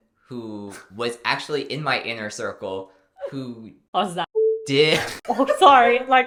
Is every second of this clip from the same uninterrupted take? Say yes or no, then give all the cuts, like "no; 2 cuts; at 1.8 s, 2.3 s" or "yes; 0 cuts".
yes; 0 cuts